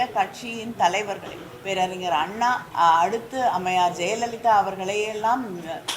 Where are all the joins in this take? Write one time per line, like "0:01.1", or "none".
0:02.7

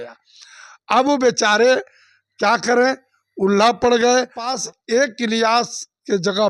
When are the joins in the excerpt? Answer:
0:04.6

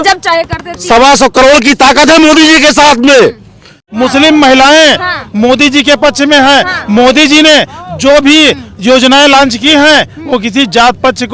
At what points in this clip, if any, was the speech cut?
0:03.9

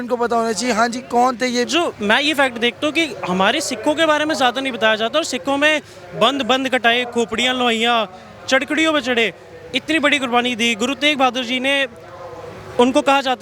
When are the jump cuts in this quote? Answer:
0:01.7

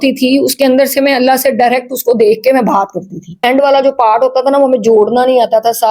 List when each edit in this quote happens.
0:03.4

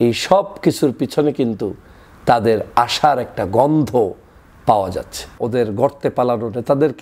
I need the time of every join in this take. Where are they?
0:05.3

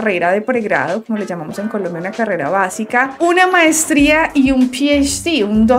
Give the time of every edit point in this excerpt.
none

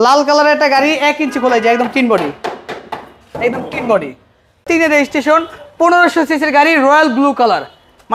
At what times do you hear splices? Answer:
0:04.6

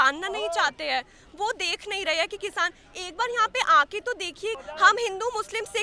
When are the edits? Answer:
0:04.6

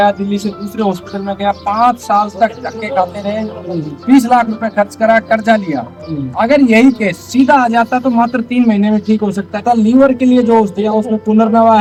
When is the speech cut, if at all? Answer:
none

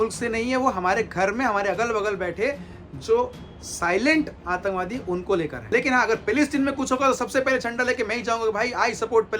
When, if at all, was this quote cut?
0:05.7

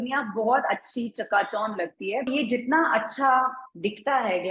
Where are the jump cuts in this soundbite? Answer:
0:02.3

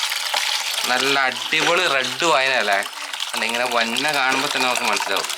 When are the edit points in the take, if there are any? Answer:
none

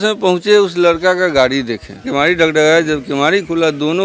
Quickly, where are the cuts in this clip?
0:02.0

